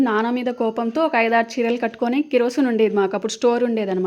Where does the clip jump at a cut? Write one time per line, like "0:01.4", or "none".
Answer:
none